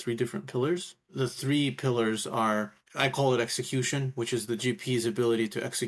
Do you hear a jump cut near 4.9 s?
no; 2 cuts; at 1.1 s, 2.8 s

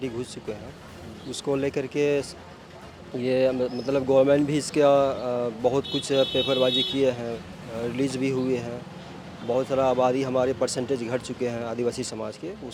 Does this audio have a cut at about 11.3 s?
no; 0 cuts

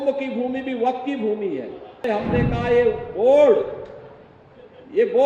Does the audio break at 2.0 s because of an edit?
yes; 1 cut; at 2.0 s

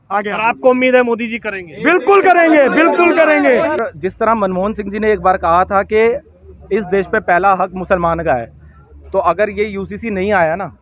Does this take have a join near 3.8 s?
yes; 1 cut; at 3.8 s

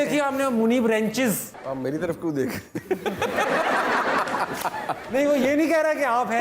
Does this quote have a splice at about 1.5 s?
yes; 1 cut; at 1.5 s

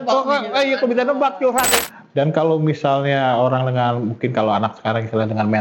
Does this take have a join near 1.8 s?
yes; 1 cut; at 1.8 s

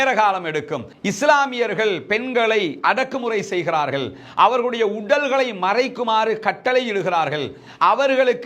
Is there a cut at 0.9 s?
yes; 1 cut; at 0.9 s

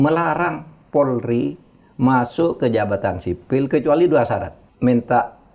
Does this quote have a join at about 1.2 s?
no; 1 cut; at 4.6 s

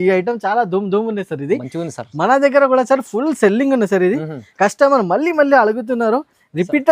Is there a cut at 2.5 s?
no; 0 cuts

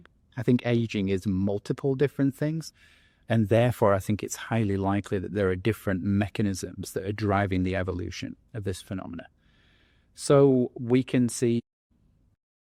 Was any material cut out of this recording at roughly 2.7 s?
no; 0 cuts

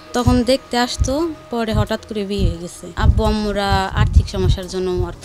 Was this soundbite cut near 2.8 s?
yes; 1 cut; at 2.8 s

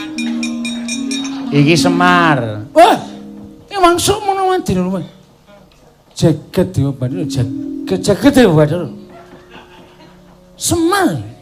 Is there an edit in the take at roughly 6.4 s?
no; 0 cuts

